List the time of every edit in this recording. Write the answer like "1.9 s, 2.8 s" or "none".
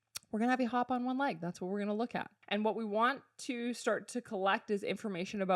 2.4 s